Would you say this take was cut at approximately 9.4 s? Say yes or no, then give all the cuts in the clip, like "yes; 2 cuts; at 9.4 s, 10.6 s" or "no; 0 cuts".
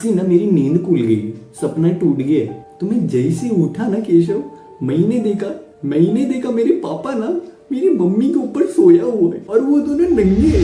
yes; 1 cut; at 9.4 s